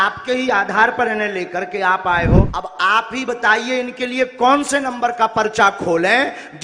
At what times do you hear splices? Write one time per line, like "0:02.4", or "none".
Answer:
0:02.6